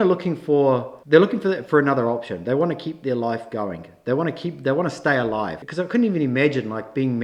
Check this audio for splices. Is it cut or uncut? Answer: cut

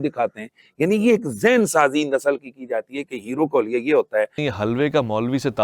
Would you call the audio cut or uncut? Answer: cut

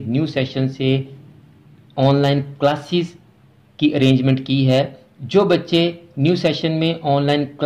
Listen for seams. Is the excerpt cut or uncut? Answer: uncut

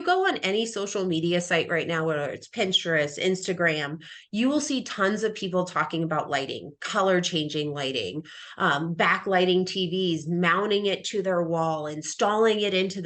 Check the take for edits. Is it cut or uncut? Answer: uncut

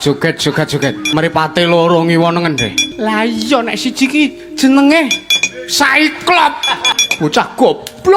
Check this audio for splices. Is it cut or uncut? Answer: cut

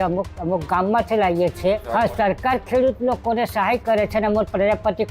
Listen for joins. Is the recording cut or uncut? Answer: cut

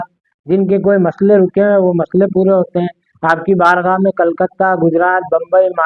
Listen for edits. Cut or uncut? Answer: uncut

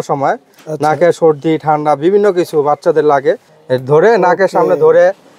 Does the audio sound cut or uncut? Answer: cut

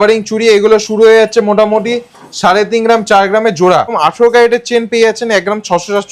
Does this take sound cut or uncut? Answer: cut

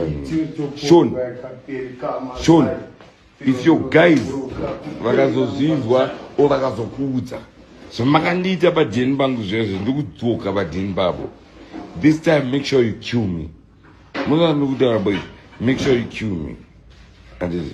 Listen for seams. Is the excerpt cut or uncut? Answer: uncut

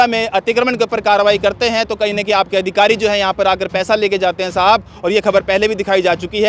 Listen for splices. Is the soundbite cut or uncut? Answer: uncut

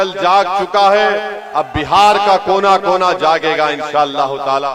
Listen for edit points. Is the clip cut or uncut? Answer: uncut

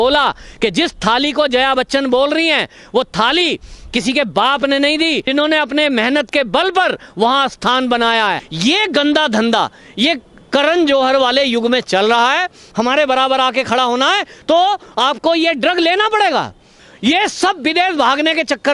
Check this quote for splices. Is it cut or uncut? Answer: cut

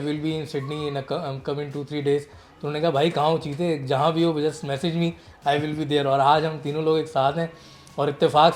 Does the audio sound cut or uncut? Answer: uncut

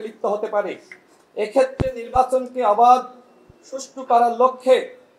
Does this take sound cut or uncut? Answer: uncut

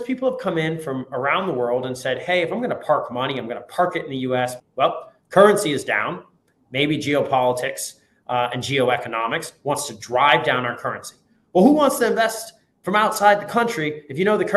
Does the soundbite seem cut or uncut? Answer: cut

